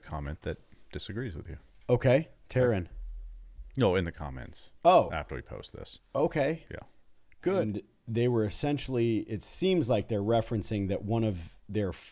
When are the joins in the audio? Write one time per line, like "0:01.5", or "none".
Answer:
0:07.7

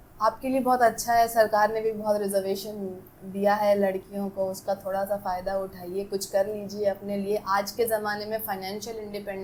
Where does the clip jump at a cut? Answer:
none

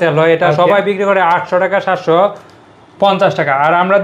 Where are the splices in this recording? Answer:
none

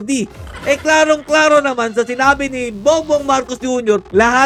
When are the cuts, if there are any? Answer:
none

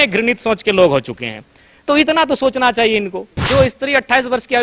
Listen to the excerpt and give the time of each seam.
0:03.4

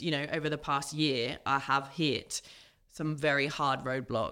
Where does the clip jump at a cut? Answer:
none

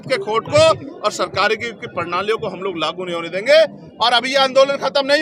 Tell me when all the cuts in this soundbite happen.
none

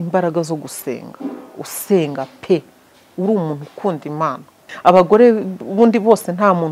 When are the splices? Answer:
0:04.6

